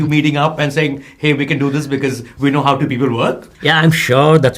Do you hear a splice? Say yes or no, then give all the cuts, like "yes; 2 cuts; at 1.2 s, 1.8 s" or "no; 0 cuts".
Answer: yes; 1 cut; at 3.5 s